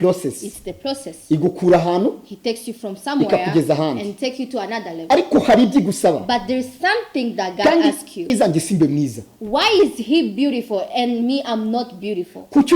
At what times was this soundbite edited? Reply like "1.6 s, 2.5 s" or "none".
8.3 s